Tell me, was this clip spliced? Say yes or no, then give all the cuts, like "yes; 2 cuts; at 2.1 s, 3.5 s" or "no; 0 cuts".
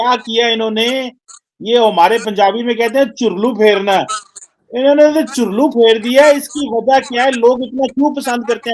no; 0 cuts